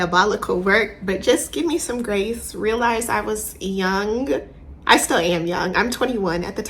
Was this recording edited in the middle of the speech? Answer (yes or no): no